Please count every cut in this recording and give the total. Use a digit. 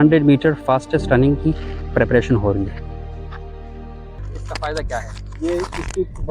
1